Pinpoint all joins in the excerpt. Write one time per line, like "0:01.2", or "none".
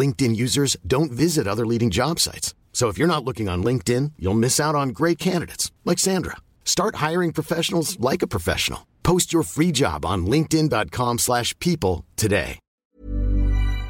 0:12.9